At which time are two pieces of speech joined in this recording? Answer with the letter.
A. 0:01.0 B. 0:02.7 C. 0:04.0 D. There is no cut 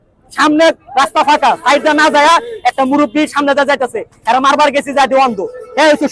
D